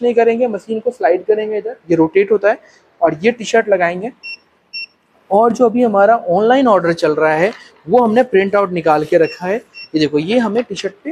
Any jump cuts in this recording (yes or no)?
no